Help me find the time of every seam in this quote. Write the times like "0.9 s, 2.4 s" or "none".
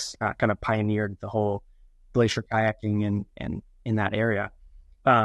none